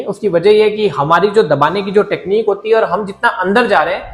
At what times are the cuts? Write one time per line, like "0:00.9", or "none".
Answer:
none